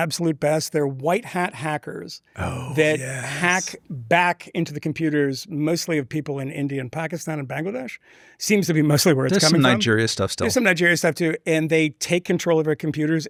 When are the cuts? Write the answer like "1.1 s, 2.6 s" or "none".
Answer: none

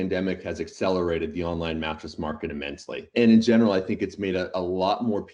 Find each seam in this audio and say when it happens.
3.1 s

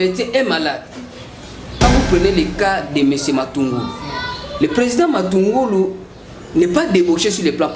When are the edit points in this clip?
1.8 s

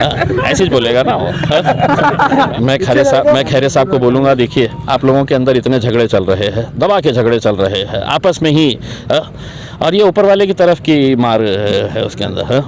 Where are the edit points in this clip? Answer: 2.5 s

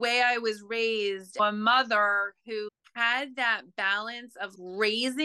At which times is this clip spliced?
1.4 s

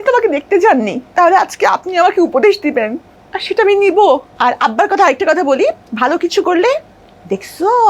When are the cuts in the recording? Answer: 1.0 s, 4.3 s

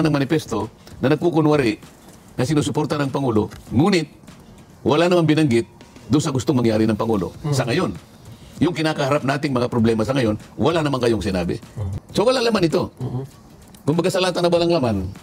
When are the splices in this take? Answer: 11.8 s

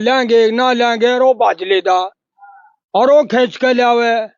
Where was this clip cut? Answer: none

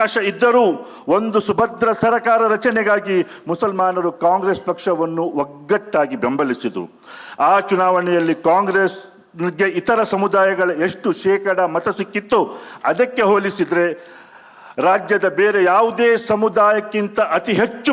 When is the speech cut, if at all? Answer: none

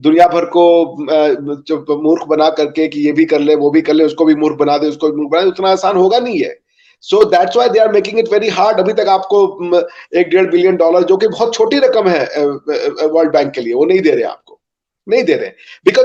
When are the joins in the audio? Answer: none

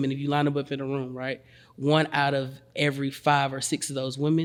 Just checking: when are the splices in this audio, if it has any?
none

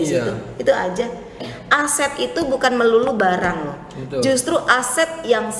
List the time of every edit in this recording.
1.4 s

